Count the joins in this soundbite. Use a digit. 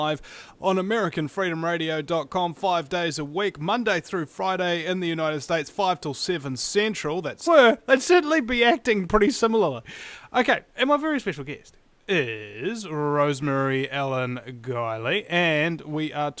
0